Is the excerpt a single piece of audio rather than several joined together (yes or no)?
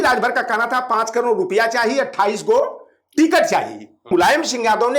no